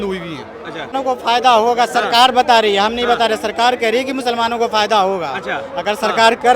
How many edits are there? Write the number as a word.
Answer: one